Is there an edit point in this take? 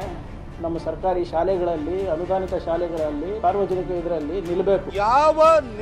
yes; 2 cuts; at 3.3 s, 4.9 s

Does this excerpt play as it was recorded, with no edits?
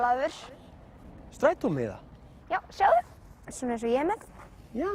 yes; 0 cuts

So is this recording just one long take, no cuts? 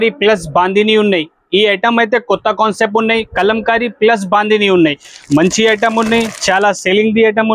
yes; 0 cuts

